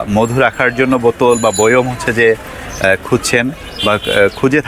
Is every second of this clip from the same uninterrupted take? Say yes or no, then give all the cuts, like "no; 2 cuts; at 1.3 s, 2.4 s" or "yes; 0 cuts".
yes; 0 cuts